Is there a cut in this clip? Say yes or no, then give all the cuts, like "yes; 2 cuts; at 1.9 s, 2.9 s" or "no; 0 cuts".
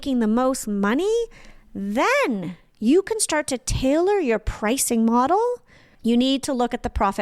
yes; 1 cut; at 5.9 s